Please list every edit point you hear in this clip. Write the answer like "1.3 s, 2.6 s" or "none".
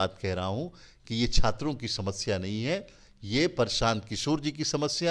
none

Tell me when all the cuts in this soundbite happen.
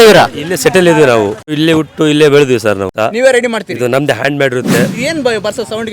1.5 s, 2.9 s, 4.9 s

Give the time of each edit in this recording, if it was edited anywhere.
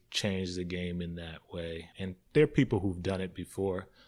1.9 s

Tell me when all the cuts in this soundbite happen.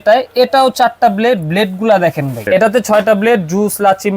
2.4 s

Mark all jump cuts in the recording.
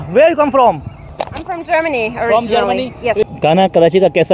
3.3 s

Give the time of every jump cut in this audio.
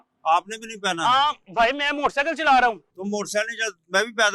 none

